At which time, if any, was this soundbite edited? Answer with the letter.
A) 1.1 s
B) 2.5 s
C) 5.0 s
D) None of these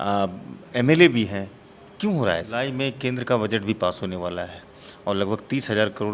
B